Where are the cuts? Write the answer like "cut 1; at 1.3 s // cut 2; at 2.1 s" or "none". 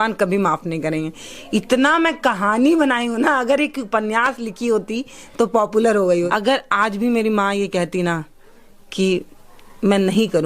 cut 1; at 6.3 s